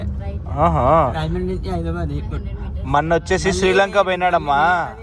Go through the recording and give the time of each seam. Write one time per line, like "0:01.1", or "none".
none

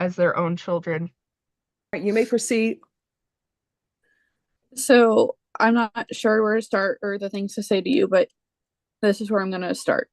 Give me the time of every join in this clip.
0:02.0

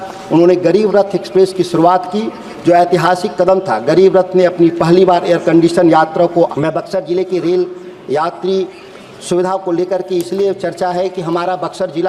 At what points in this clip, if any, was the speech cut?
0:06.5

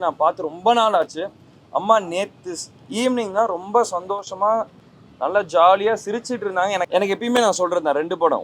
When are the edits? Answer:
0:06.9

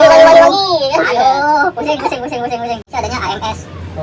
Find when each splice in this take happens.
0:02.9

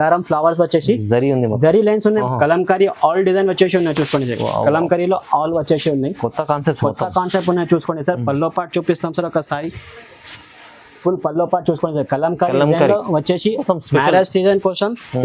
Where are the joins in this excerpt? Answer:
0:02.2
0:13.6

